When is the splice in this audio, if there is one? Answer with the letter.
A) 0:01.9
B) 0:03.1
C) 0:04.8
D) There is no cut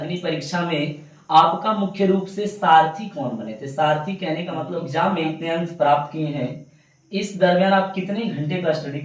C